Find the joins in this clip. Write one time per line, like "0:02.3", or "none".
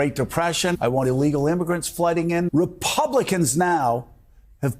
0:00.8
0:02.5